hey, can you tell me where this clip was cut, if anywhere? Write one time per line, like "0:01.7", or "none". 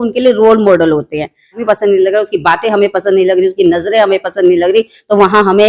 0:01.6